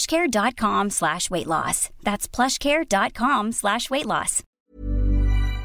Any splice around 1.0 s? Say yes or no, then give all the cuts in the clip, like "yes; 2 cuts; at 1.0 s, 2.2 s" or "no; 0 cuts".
no; 1 cut; at 4.6 s